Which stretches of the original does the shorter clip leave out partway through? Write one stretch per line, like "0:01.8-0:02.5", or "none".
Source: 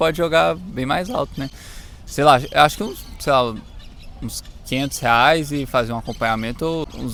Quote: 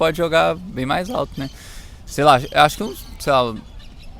none

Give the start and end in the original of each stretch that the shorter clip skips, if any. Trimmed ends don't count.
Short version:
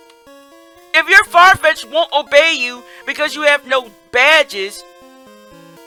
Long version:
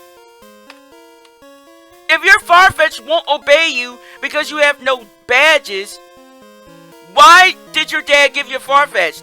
none

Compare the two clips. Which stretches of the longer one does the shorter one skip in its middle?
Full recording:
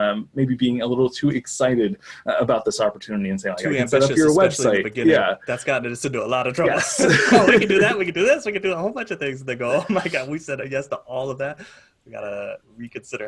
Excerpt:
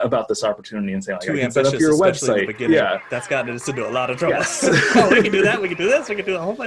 none

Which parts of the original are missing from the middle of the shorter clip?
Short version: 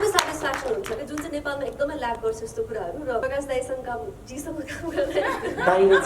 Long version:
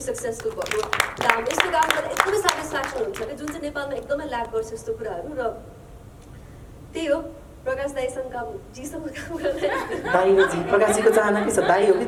0:05.5-0:07.7

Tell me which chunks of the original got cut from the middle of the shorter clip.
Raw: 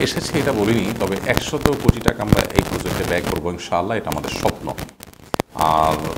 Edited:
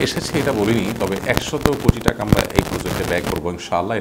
none

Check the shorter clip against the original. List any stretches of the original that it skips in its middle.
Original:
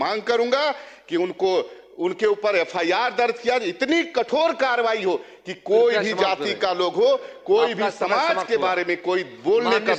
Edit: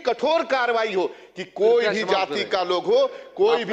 none

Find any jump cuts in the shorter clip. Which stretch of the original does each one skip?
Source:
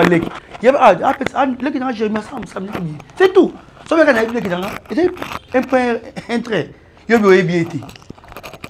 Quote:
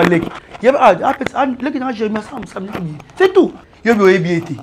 0:03.7-0:06.9

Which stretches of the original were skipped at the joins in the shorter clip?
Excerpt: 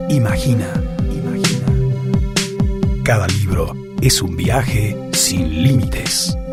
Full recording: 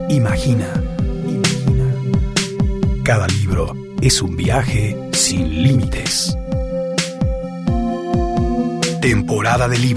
none

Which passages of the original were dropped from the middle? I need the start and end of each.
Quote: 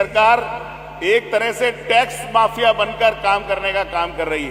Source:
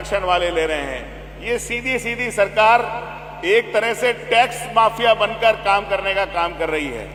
none

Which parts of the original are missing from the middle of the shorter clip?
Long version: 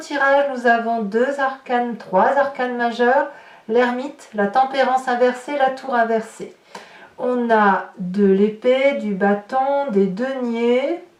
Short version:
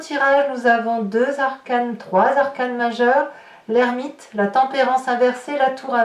none

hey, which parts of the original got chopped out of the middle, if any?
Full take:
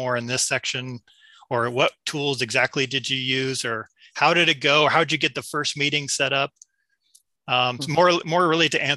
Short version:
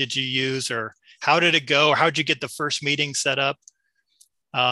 none

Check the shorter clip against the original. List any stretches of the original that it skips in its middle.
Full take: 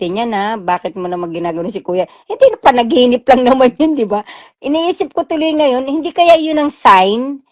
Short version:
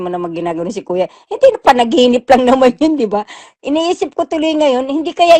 none

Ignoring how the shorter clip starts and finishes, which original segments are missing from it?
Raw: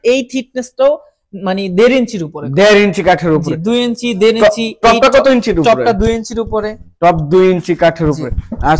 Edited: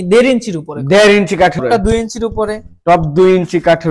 0:03.3-0:05.8

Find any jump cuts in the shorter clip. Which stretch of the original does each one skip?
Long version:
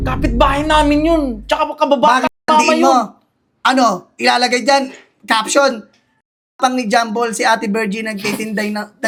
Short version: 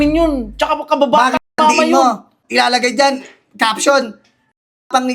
0:03.3-0:04.1

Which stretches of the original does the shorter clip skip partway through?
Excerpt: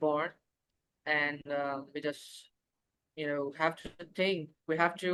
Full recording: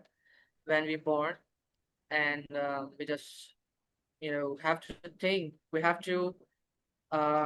none

